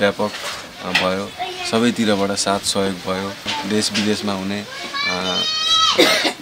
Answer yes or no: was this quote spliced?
yes